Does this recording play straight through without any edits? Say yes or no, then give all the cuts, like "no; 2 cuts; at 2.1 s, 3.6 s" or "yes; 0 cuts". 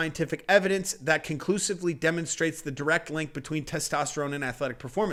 yes; 0 cuts